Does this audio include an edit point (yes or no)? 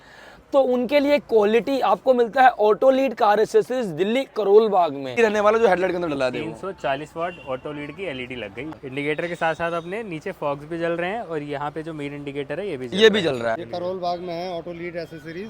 yes